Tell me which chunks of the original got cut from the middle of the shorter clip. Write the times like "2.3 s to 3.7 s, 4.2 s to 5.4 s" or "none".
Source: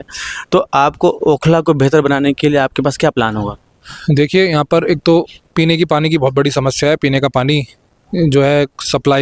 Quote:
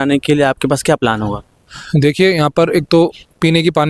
none